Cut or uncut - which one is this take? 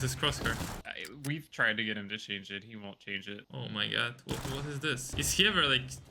cut